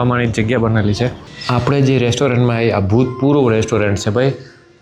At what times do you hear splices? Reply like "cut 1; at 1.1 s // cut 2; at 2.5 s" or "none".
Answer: cut 1; at 1.3 s